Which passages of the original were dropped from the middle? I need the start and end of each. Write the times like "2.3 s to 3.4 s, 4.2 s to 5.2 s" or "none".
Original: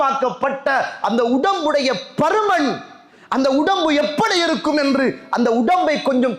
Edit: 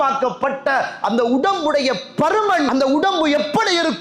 2.7 s to 3.3 s